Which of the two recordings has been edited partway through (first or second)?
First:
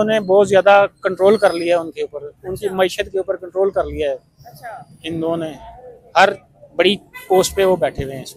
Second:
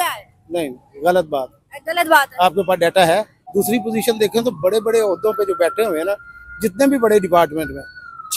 second